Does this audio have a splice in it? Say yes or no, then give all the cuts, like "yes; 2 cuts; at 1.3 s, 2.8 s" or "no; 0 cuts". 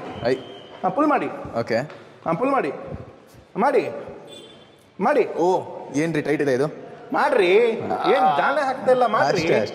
no; 0 cuts